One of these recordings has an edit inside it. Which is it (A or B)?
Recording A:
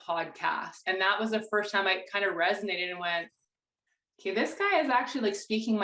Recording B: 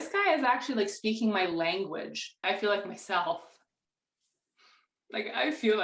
B